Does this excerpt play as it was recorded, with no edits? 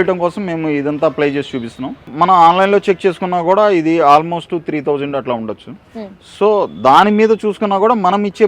no; 1 cut; at 2.1 s

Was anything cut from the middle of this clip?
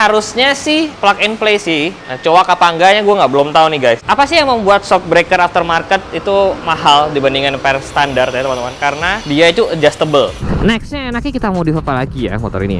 yes; 6 cuts; at 0.9 s, 2.0 s, 4.0 s, 6.6 s, 9.2 s, 10.4 s

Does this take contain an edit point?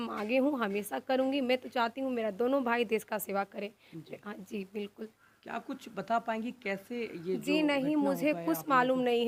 no; 0 cuts

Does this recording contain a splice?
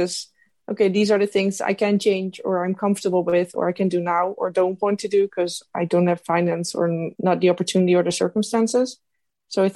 no; 0 cuts

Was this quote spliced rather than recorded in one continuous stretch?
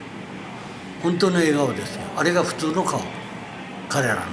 yes; 1 cut; at 1.0 s

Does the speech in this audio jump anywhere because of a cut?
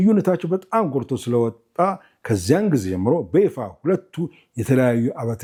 no; 0 cuts

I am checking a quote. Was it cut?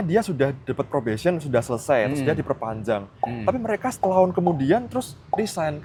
no; 0 cuts

